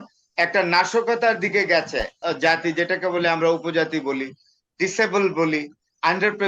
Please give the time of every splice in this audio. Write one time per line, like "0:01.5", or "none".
0:02.1